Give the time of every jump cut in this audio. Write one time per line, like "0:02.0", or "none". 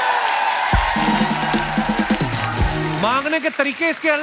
0:03.0